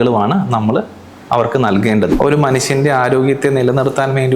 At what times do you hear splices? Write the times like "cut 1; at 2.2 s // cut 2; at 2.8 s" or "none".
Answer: cut 1; at 2.1 s

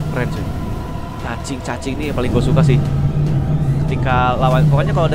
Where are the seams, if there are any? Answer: none

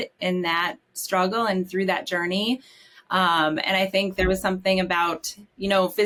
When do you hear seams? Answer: none

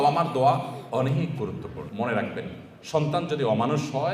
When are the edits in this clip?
cut 1; at 1.9 s

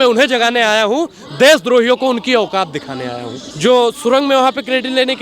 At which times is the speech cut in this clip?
cut 1; at 3.4 s

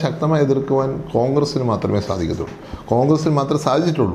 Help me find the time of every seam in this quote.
none

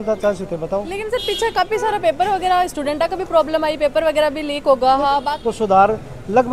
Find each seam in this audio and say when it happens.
cut 1; at 5.3 s

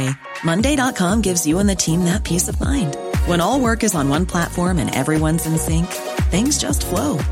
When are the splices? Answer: none

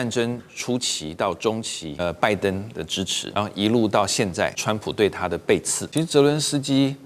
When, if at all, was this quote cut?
cut 1; at 1.8 s // cut 2; at 3.2 s // cut 3; at 4.6 s // cut 4; at 5.8 s

